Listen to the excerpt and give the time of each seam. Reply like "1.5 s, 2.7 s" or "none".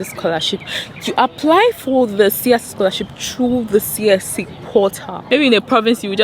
5.2 s